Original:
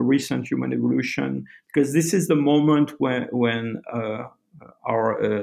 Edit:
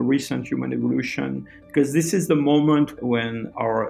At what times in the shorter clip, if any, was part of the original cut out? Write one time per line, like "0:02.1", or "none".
0:02.9